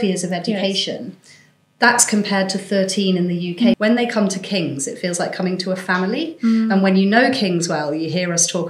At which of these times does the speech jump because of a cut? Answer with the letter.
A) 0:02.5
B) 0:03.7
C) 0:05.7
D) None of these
B